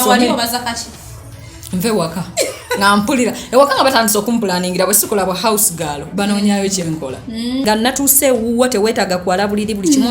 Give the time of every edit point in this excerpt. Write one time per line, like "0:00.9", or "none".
0:07.6